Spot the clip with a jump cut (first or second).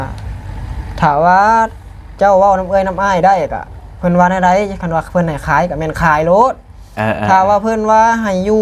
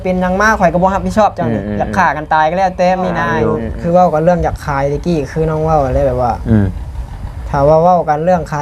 second